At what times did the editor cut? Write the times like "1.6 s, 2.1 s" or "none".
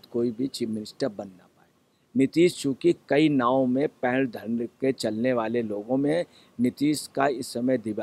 2.0 s

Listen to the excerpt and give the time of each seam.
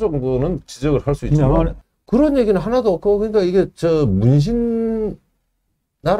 1.8 s

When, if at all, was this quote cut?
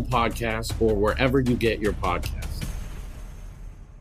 2.2 s

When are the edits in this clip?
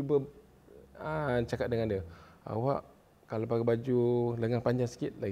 none

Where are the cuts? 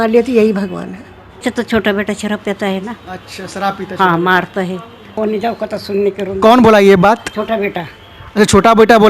1.4 s, 5.2 s

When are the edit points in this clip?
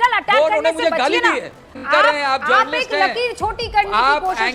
1.7 s

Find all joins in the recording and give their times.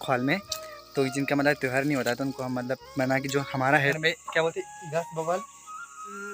3.9 s

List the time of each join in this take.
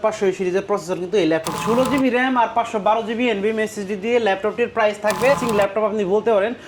1.5 s, 5.4 s

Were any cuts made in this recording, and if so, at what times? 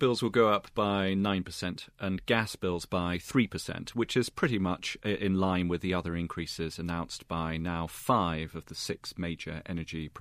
none

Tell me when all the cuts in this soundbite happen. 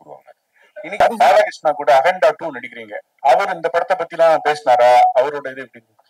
1.0 s

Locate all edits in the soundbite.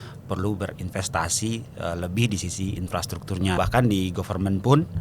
3.6 s

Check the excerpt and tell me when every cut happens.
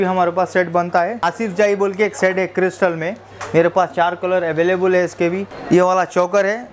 1.3 s, 3.3 s, 5.5 s

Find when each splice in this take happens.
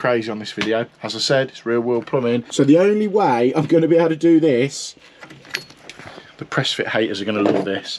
0.9 s, 2.5 s

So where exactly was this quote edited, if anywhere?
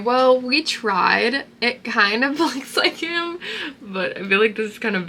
none

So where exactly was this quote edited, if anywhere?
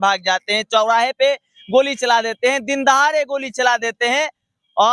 none

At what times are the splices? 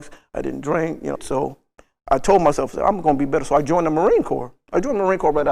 1.2 s

